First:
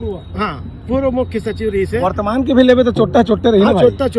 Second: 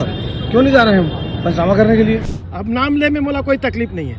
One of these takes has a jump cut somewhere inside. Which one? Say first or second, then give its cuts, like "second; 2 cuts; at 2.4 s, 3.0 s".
second; 1 cut; at 2.4 s